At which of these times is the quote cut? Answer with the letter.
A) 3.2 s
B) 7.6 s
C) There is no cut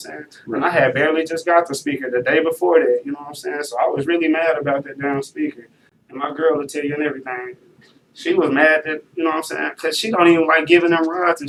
C